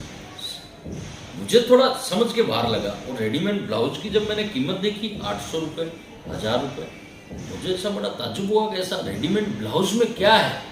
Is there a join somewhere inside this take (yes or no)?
no